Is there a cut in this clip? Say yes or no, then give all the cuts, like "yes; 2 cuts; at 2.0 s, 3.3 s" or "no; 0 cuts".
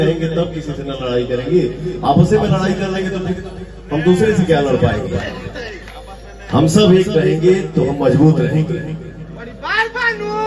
no; 0 cuts